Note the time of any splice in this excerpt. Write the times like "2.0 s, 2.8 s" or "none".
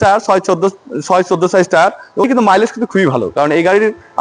2.2 s